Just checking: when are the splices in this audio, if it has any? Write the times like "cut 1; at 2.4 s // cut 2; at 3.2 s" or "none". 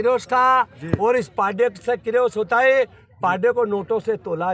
none